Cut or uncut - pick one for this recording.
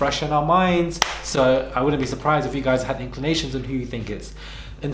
uncut